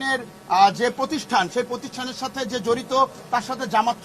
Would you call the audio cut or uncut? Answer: uncut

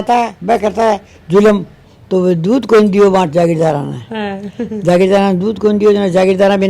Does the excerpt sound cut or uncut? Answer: cut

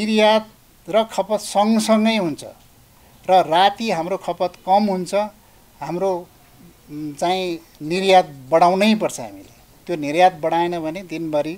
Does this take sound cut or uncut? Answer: uncut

